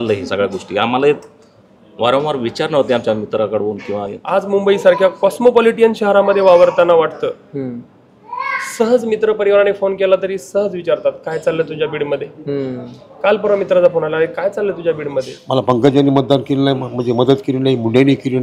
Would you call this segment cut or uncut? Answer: cut